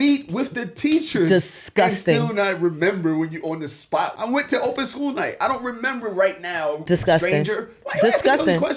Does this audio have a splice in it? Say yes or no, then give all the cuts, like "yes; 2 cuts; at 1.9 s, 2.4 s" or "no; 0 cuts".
yes; 2 cuts; at 4.1 s, 6.8 s